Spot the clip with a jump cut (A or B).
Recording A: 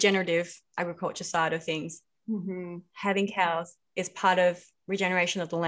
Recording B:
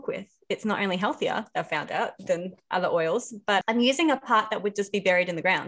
B